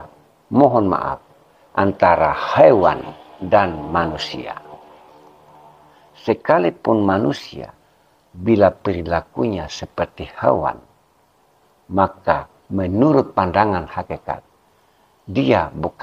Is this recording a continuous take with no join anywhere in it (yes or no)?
yes